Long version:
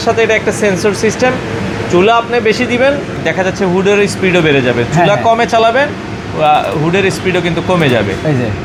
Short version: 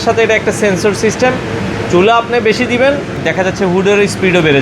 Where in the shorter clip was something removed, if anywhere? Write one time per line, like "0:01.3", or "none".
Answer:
none